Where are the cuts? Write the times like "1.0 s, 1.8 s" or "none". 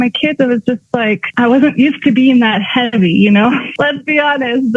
1.3 s, 3.7 s